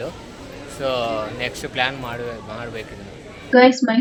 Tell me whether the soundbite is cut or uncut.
uncut